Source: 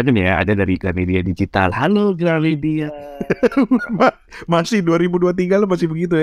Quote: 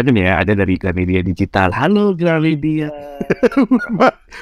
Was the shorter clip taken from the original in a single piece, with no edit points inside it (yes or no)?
yes